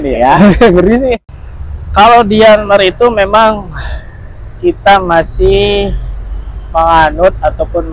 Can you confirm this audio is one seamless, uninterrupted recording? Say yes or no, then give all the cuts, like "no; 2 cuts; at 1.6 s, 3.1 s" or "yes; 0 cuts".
no; 1 cut; at 1.2 s